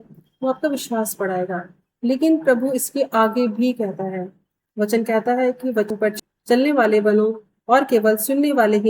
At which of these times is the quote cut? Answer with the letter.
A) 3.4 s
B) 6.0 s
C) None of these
B